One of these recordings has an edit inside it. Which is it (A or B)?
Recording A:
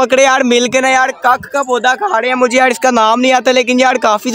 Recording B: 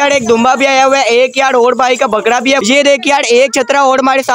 B